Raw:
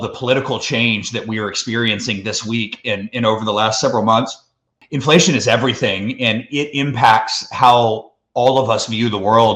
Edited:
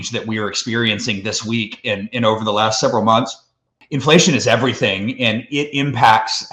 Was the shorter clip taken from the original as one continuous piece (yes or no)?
yes